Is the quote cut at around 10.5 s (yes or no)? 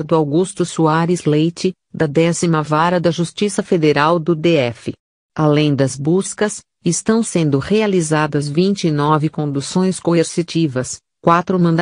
yes